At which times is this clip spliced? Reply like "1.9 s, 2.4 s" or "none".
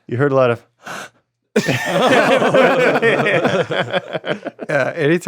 none

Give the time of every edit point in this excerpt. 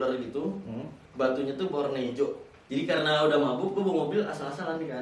2.5 s

